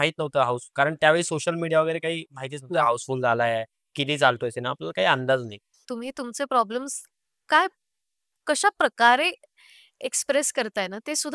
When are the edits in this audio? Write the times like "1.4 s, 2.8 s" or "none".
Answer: 5.9 s